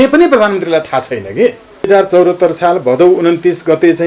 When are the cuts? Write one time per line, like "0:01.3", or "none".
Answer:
0:01.9